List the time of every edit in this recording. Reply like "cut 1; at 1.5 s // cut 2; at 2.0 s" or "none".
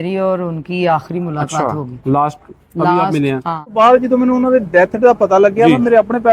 cut 1; at 3.7 s